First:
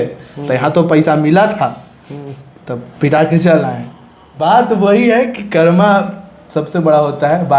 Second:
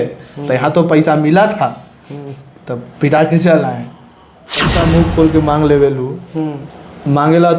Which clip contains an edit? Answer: second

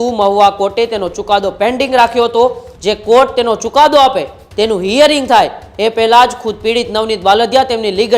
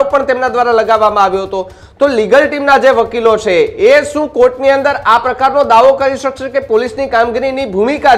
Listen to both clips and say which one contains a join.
first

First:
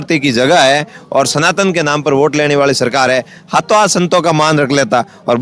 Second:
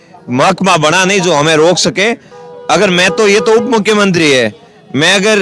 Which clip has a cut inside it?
second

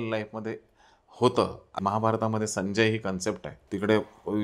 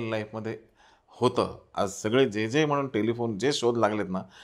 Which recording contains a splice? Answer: first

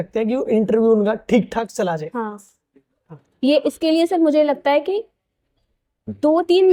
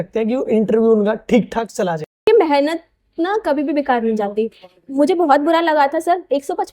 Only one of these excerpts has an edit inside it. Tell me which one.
second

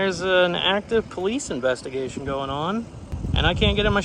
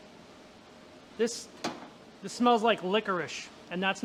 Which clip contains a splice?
first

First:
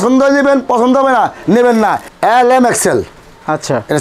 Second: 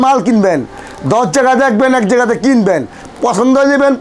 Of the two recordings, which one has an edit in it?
first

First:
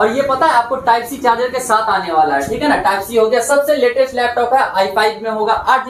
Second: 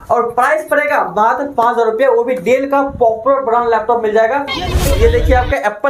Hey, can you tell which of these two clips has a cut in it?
second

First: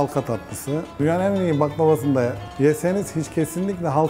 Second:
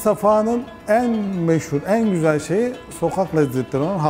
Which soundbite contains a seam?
first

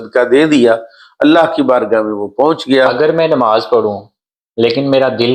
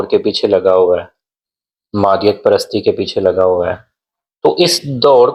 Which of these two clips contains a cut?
first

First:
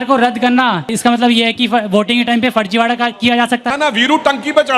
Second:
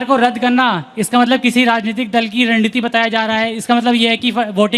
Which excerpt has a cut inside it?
first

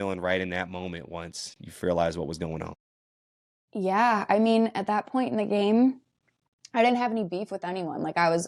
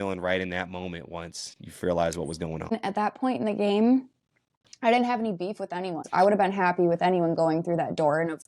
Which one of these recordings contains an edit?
second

